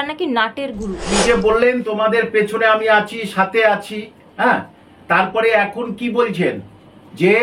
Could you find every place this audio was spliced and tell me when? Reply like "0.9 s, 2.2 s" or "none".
1.2 s